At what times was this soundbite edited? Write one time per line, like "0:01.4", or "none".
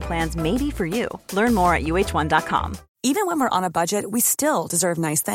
0:02.8